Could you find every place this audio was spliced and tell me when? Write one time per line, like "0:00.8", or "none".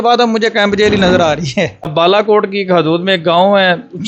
0:01.9